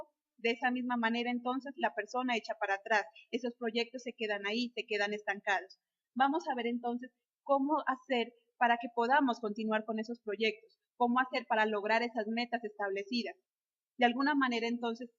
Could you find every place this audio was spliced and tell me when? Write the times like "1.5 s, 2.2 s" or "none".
12.8 s